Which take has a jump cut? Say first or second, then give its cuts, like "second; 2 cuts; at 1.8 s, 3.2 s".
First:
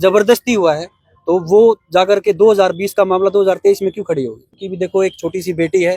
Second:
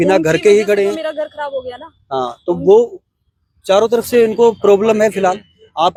first; 1 cut; at 4.6 s